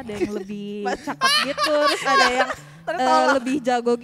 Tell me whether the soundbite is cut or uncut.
uncut